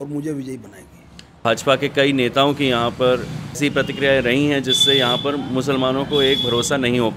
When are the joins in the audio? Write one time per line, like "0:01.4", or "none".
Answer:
0:01.3
0:03.6

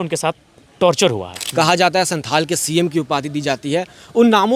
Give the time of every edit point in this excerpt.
0:01.3

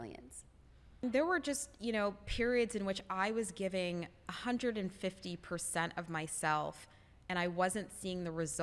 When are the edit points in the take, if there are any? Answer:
0:01.0

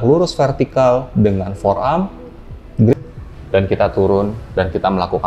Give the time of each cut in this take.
0:02.9

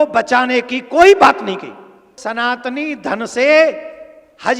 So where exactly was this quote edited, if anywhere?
0:02.0

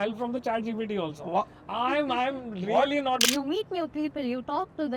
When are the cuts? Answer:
0:03.2

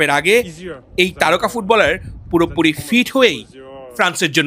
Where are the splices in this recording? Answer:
none

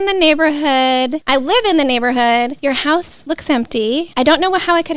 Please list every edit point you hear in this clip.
0:01.2
0:02.8
0:04.1

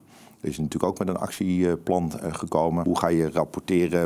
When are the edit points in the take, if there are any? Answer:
0:02.8

